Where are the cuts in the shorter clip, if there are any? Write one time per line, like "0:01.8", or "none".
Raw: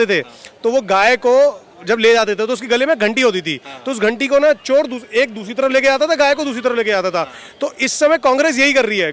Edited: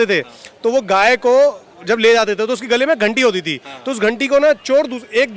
none